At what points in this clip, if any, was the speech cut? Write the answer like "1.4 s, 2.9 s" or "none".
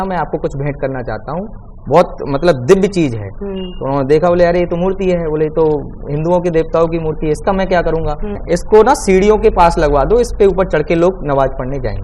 8.4 s